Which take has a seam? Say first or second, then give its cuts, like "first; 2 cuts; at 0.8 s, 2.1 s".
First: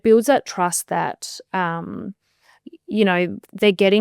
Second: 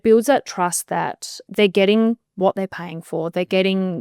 second; 1 cut; at 1.4 s